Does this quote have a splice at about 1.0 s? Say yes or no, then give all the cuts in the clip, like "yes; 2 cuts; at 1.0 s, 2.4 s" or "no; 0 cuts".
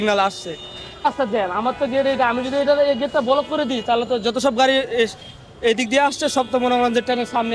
yes; 1 cut; at 1.0 s